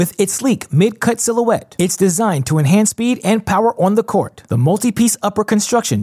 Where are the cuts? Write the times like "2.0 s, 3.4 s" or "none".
none